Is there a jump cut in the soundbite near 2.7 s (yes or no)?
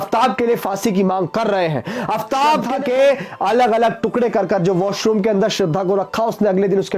yes